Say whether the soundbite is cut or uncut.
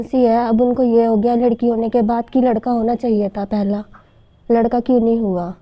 uncut